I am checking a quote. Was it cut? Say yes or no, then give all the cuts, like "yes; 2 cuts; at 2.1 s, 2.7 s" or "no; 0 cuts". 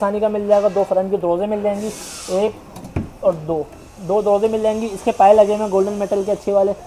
no; 0 cuts